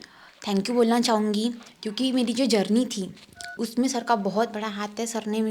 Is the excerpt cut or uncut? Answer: cut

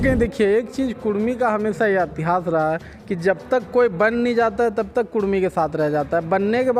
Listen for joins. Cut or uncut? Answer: uncut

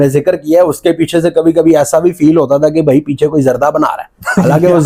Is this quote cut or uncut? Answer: uncut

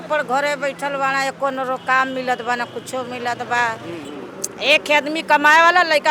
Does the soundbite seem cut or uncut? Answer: cut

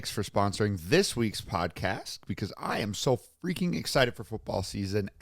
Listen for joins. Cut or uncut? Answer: uncut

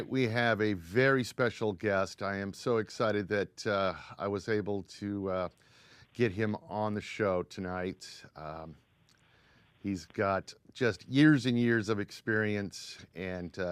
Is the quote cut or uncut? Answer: uncut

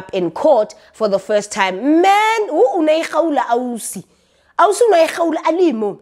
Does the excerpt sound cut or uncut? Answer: uncut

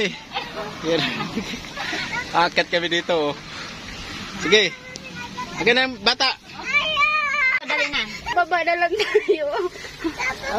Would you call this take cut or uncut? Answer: uncut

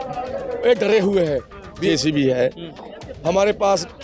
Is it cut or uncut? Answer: cut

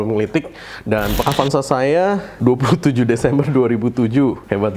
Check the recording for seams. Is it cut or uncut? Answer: cut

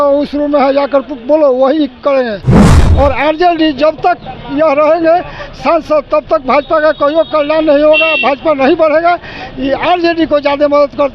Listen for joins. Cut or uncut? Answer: cut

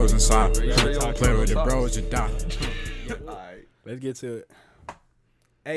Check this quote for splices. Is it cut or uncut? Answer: cut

